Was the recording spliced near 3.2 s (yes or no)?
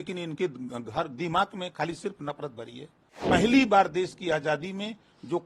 yes